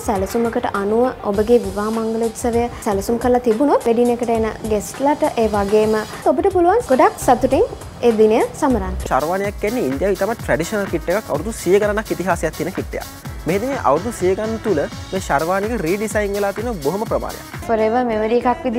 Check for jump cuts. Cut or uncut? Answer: cut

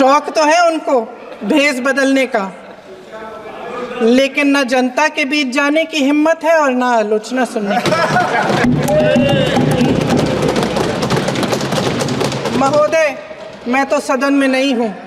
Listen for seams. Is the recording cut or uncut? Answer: uncut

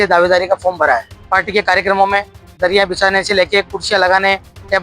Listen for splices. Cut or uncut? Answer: cut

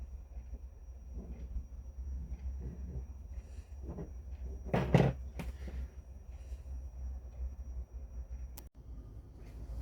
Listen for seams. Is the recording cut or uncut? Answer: cut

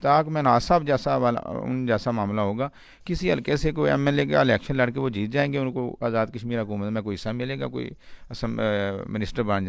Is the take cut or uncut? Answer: uncut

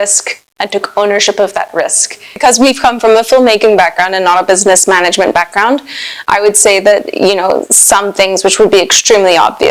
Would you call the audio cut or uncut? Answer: cut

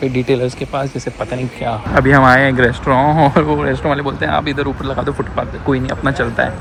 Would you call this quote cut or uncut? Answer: uncut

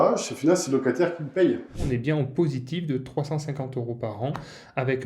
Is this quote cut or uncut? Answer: cut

